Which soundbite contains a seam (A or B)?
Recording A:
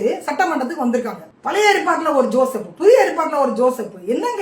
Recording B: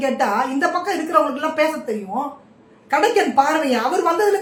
A